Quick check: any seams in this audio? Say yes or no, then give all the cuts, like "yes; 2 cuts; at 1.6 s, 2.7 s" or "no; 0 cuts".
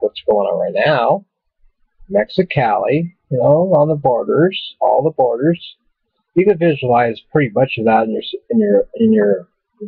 yes; 1 cut; at 2.3 s